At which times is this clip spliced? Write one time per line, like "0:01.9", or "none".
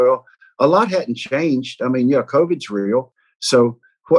0:03.2